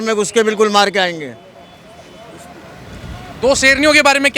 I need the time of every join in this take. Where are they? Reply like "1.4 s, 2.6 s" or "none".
none